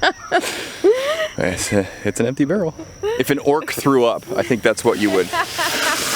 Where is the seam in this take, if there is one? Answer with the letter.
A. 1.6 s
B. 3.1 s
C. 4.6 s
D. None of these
B